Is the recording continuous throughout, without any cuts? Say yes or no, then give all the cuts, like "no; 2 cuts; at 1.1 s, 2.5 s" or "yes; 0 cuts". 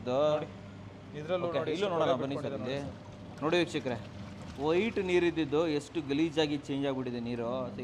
yes; 0 cuts